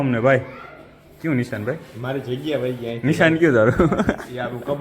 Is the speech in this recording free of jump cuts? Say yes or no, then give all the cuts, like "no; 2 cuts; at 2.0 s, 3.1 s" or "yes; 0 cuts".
yes; 0 cuts